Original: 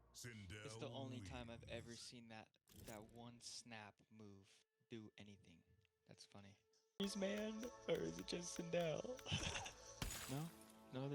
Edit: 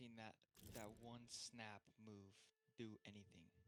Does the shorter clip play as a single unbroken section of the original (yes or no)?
yes